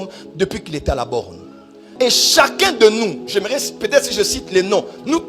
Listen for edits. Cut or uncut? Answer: cut